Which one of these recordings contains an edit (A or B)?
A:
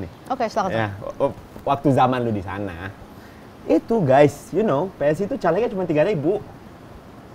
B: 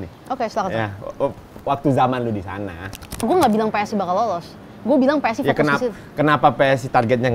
B